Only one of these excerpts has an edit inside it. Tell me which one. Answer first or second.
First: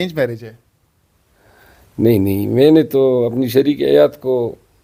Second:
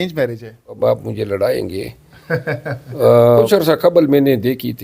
second